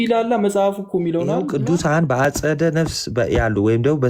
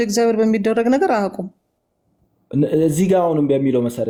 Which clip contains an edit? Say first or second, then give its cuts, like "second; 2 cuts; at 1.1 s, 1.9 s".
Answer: first; 1 cut; at 1.5 s